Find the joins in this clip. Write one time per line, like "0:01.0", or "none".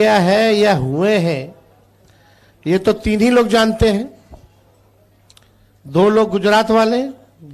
none